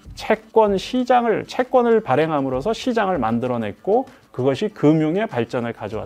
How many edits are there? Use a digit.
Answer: 0